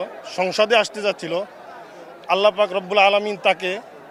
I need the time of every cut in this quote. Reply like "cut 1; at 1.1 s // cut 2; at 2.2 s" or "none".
none